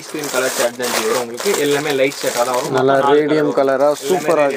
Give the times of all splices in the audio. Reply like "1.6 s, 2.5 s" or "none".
none